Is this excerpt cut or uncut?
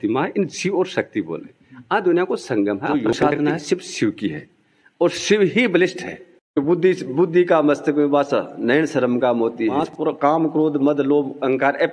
cut